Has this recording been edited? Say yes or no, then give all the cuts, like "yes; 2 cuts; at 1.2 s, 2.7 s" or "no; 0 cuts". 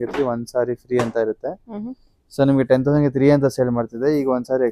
no; 0 cuts